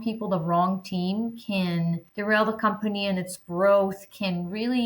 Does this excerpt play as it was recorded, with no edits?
no; 1 cut; at 2.1 s

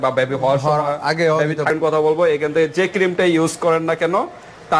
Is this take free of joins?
no; 1 cut; at 1.7 s

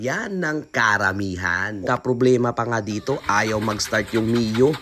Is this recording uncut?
no; 1 cut; at 1.8 s

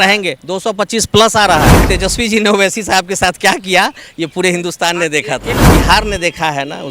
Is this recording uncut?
no; 2 cuts; at 1.8 s, 5.6 s

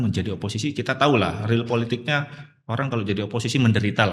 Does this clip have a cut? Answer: no; 0 cuts

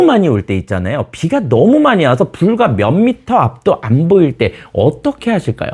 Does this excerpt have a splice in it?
no; 0 cuts

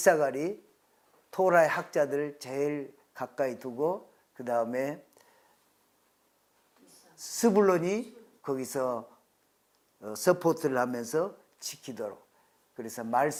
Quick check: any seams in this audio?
no; 0 cuts

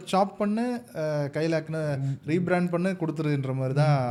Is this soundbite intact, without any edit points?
yes; 0 cuts

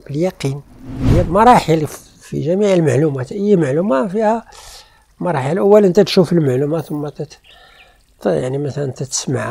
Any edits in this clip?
yes; 1 cut; at 1.2 s

